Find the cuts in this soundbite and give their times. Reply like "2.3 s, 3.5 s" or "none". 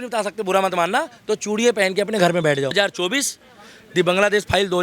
2.7 s